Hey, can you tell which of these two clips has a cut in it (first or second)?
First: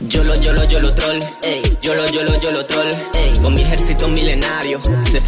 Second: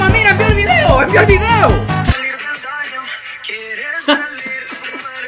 second